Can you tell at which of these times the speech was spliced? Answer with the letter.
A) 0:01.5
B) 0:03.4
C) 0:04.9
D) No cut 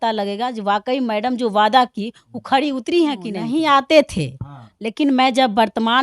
B